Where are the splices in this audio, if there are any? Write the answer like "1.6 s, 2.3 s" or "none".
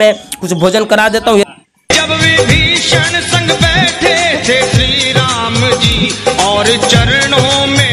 1.5 s